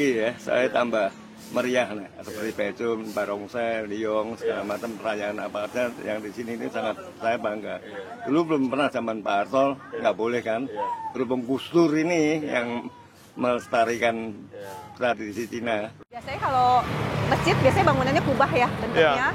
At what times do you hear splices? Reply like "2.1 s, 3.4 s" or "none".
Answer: 16.3 s